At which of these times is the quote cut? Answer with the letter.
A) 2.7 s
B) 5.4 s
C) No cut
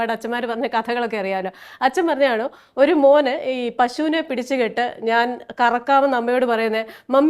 C